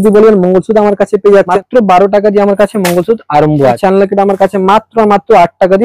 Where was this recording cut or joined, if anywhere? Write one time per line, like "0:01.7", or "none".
0:01.6
0:03.8